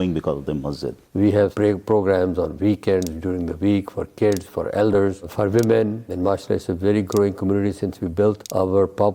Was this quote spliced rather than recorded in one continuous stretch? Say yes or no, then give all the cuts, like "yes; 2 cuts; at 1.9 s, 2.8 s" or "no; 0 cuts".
yes; 1 cut; at 1.1 s